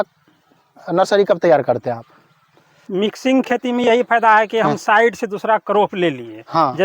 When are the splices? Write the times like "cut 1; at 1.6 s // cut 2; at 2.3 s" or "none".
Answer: cut 1; at 2.7 s